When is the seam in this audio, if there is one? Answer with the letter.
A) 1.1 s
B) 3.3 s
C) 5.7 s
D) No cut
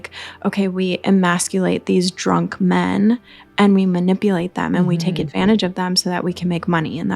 D